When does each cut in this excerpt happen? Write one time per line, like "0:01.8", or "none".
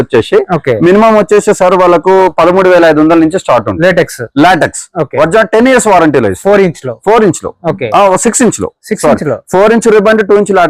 none